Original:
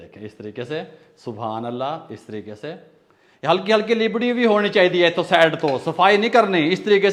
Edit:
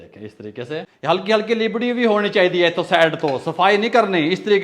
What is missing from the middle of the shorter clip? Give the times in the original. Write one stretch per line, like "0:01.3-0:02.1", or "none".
0:00.9-0:03.3